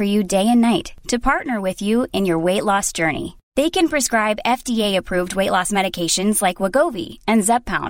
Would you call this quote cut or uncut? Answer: uncut